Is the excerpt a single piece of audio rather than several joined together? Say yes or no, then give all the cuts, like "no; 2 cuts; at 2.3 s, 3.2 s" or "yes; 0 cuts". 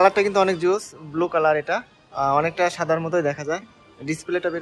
yes; 0 cuts